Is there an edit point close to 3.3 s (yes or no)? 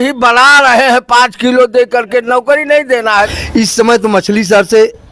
yes